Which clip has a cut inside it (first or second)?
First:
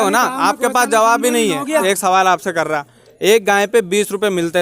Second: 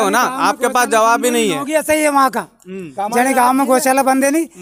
first